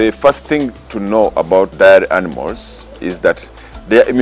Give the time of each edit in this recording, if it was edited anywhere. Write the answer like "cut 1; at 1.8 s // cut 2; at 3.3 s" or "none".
cut 1; at 1.7 s